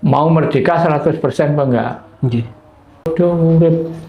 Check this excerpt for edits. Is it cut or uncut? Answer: cut